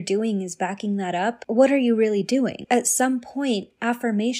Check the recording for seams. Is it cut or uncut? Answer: cut